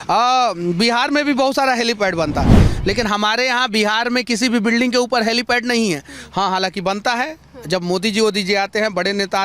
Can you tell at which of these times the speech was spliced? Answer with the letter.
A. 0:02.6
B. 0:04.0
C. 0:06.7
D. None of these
A